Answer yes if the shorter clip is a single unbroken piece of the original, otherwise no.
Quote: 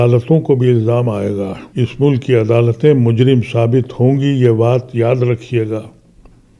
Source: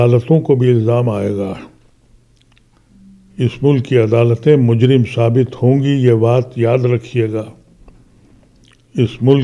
no